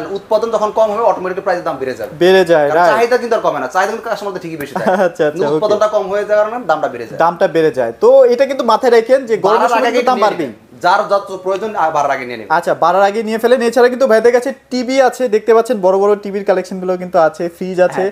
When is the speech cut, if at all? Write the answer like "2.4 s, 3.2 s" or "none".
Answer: none

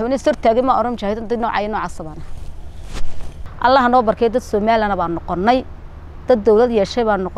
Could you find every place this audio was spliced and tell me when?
3.4 s

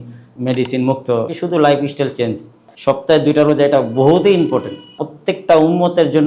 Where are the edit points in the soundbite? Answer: 1.3 s, 2.7 s, 5.0 s

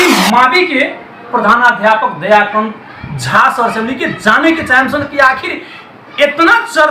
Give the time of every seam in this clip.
none

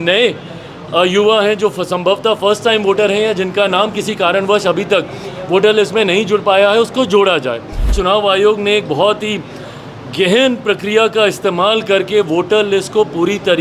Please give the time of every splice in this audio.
7.9 s

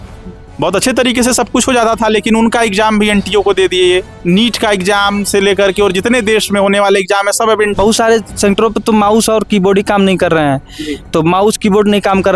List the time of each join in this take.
7.7 s

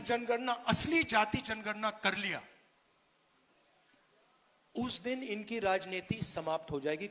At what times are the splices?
none

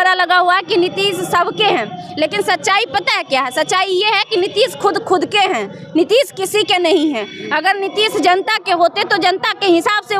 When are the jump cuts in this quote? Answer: none

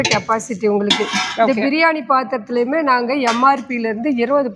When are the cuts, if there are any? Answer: none

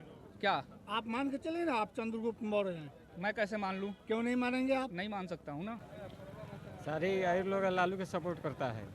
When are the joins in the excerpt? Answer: 5.9 s

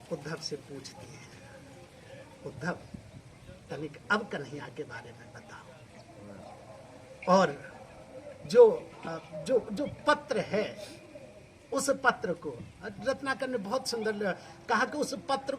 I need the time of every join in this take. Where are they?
none

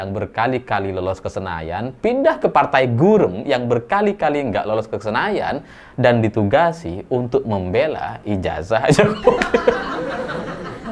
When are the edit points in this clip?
9.8 s

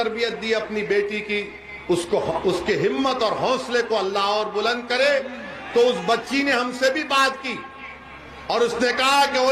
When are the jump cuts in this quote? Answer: none

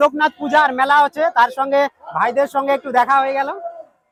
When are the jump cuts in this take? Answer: none

